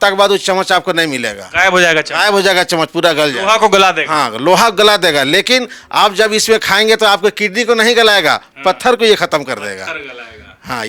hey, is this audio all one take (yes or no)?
yes